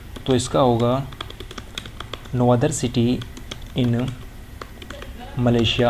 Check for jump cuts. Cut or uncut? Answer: uncut